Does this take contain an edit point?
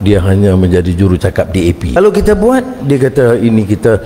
yes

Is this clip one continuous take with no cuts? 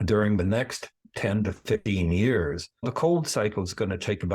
no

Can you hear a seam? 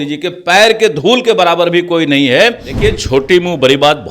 yes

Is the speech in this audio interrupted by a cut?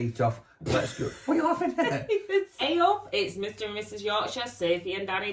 yes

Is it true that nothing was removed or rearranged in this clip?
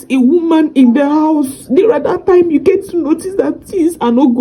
yes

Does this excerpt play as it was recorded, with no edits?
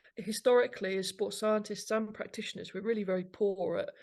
yes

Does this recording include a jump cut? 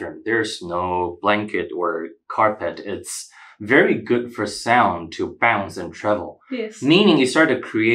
no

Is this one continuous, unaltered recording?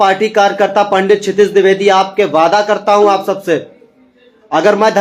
yes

